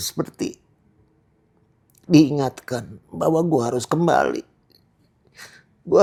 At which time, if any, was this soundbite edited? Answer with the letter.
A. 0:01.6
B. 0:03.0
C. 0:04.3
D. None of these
D